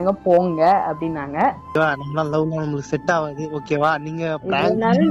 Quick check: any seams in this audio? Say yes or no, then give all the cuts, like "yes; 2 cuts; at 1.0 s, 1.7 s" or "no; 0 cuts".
yes; 1 cut; at 1.8 s